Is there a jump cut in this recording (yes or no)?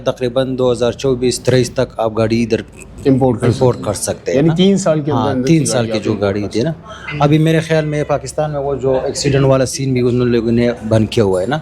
no